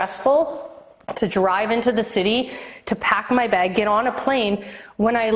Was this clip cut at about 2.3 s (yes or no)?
no